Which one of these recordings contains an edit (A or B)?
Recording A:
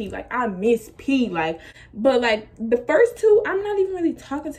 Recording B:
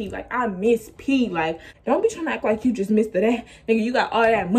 B